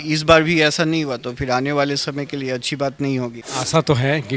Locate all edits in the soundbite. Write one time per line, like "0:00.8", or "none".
0:03.4